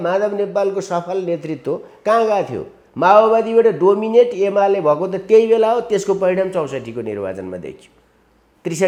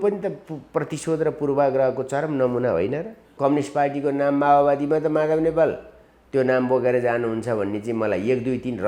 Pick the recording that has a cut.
second; 1 cut; at 3.2 s

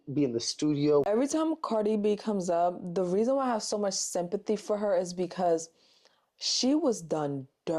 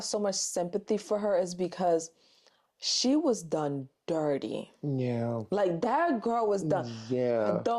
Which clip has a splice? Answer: first; 1 cut; at 1.0 s

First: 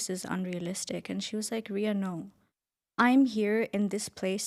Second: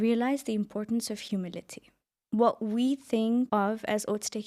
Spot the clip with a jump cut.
second; 2 cuts; at 1.9 s, 3.5 s

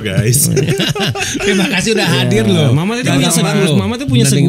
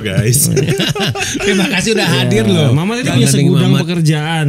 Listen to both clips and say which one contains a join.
second; 1 cut; at 3.1 s

